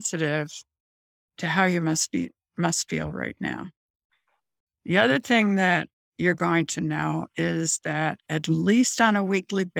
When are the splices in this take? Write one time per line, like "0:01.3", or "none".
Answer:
none